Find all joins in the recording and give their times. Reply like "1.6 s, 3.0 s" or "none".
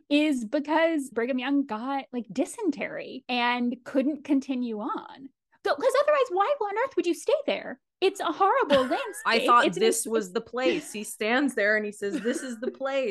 1.1 s